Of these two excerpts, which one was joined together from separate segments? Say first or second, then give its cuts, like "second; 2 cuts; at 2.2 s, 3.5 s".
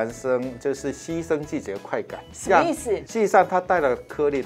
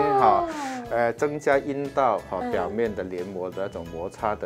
first; 2 cuts; at 2.2 s, 3.1 s